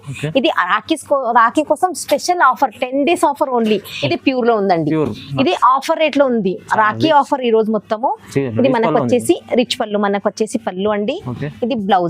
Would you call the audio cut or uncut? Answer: cut